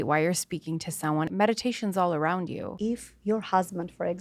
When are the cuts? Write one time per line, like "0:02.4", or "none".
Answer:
0:01.3
0:02.7